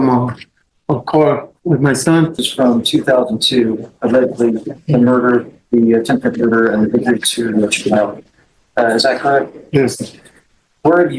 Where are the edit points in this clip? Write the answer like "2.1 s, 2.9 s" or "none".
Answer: 2.4 s